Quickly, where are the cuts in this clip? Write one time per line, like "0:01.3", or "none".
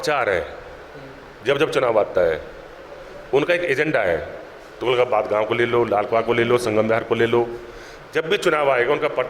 none